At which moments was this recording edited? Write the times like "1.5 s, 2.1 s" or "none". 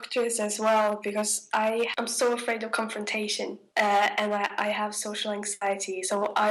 1.9 s, 3.6 s